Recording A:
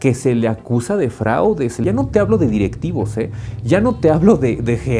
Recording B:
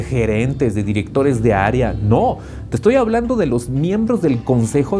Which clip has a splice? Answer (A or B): A